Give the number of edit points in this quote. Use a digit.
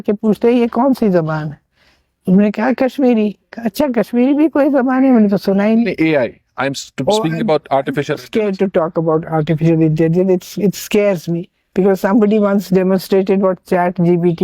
1